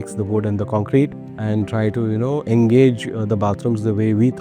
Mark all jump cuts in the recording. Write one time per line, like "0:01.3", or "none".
0:01.4